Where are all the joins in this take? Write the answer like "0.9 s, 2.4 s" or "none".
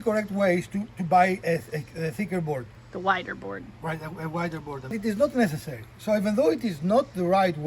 2.8 s, 4.9 s